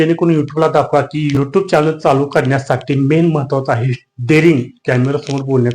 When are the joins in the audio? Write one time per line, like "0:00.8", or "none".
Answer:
0:01.3